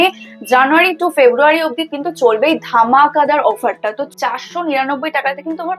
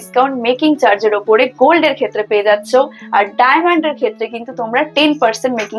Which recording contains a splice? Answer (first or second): first